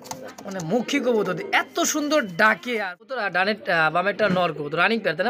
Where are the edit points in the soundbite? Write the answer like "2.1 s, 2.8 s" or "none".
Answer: 3.2 s